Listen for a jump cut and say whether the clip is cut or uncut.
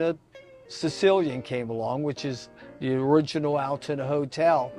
uncut